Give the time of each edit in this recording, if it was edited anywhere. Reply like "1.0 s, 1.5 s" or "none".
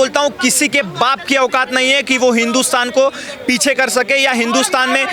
none

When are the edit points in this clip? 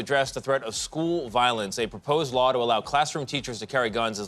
none

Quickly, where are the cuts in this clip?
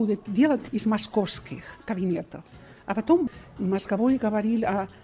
3.2 s

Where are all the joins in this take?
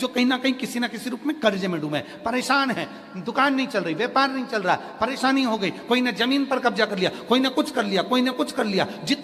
none

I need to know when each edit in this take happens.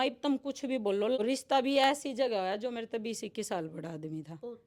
1.2 s

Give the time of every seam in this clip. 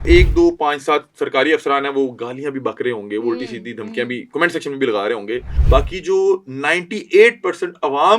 5.5 s

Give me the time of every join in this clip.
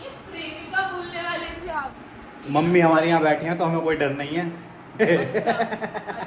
1.9 s

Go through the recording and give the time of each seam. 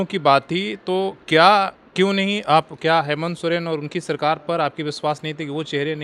none

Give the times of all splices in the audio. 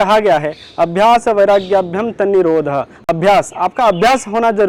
none

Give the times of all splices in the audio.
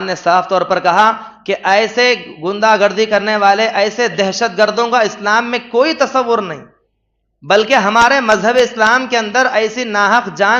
none

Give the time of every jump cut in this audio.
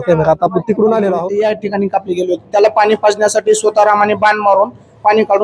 1.3 s

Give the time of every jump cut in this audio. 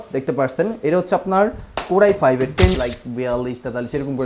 2.8 s

